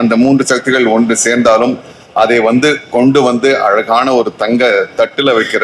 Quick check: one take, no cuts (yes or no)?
yes